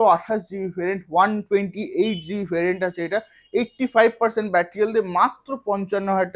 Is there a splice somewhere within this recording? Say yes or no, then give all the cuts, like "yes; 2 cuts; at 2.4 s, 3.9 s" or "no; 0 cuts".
no; 0 cuts